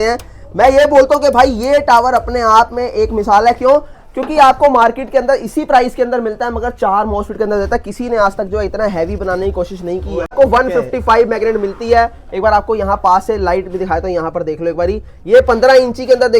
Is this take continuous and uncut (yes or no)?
no